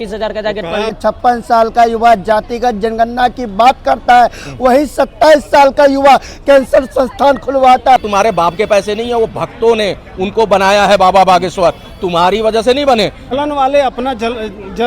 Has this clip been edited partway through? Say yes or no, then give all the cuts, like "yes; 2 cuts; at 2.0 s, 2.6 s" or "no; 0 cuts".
yes; 3 cuts; at 1.0 s, 8.1 s, 13.2 s